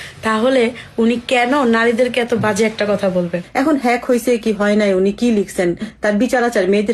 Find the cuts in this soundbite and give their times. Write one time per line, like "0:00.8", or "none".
0:03.4